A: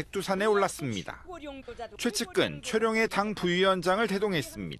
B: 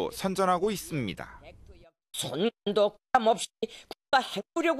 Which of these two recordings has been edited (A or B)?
B